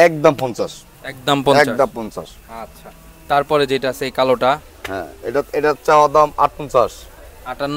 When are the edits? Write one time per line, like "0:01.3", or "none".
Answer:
none